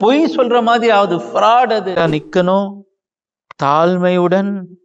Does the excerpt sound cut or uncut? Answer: cut